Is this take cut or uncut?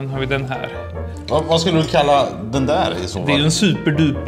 uncut